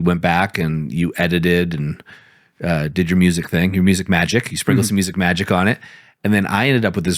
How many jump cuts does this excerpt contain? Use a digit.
0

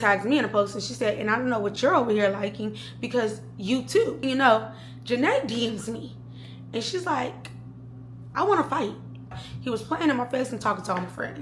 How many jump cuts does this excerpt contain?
2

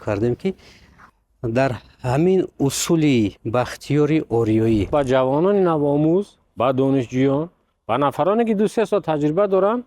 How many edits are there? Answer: 1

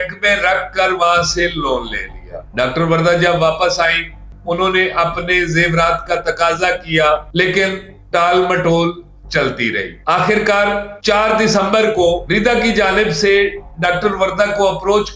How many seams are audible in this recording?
0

